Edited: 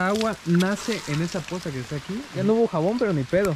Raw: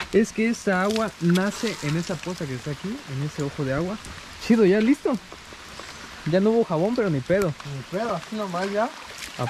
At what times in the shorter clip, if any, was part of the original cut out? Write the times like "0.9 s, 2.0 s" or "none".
2.4 s